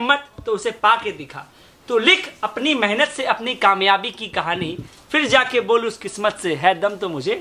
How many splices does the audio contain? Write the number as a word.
zero